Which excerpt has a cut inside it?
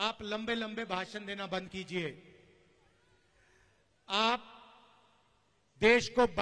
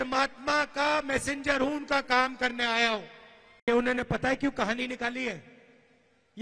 second; 1 cut; at 3.7 s

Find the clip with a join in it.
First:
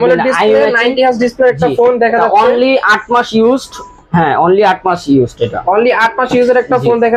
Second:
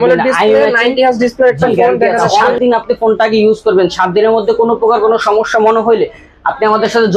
second; 1 cut; at 2.6 s

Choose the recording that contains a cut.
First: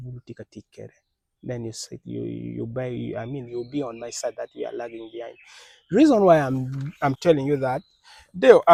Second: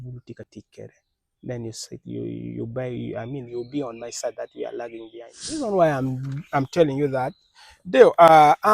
second; 1 cut; at 5.6 s

